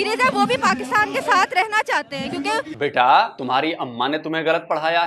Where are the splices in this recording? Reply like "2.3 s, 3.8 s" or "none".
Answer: 2.7 s, 3.4 s